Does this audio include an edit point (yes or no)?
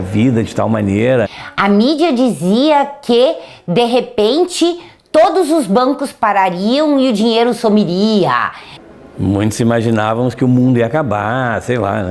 yes